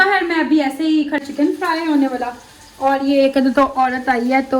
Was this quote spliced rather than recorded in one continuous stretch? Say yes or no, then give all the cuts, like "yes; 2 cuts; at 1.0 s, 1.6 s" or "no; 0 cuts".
yes; 1 cut; at 1.2 s